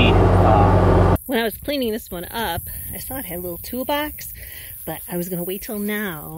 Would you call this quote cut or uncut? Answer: cut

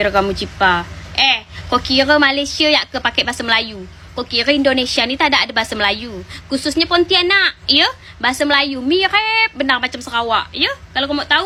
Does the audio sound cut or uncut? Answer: uncut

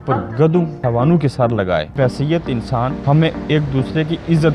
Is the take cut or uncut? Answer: cut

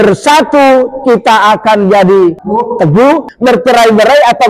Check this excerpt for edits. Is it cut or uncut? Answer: cut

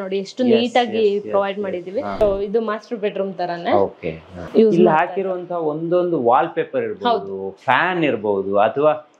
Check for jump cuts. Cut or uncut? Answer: cut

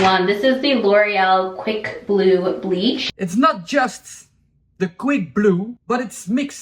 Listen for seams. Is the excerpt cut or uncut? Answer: cut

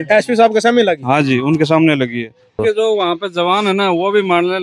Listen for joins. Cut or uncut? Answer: cut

